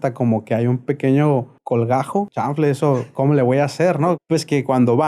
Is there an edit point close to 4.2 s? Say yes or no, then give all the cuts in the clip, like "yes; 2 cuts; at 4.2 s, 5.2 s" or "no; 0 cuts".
yes; 2 cuts; at 2.0 s, 4.2 s